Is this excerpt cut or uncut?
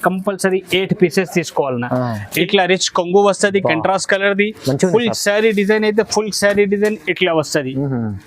cut